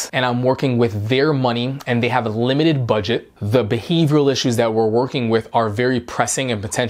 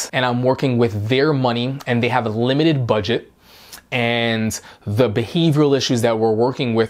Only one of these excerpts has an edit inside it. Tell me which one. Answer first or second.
first